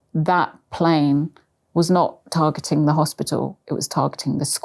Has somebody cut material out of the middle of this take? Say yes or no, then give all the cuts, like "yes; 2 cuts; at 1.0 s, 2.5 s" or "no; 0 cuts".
no; 0 cuts